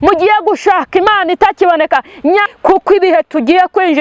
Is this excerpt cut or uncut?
cut